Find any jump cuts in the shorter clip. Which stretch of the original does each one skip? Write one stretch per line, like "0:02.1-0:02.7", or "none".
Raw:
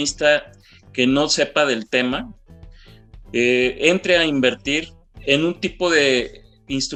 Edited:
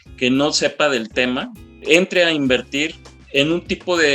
0:02.6-0:03.8